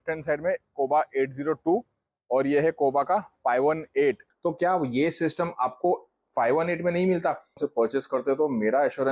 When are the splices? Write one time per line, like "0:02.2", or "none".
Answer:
0:04.3
0:07.6